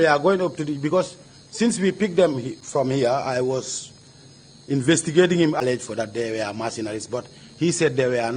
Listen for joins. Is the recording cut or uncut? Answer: cut